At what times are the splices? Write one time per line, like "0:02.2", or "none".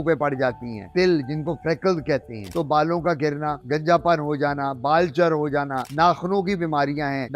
0:00.9
0:02.5